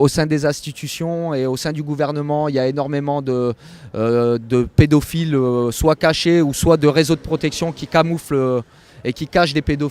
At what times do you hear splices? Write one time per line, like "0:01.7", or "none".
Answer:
none